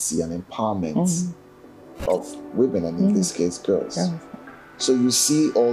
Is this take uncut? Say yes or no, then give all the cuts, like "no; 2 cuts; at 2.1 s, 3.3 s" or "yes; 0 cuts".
yes; 0 cuts